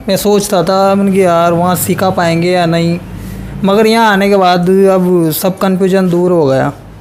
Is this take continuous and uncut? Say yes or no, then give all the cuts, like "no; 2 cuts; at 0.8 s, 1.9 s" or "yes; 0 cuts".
yes; 0 cuts